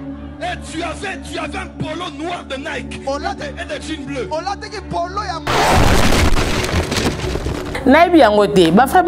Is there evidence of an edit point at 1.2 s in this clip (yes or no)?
no